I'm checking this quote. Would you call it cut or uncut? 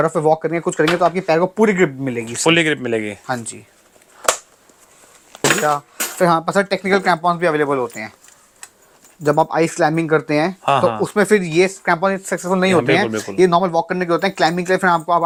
uncut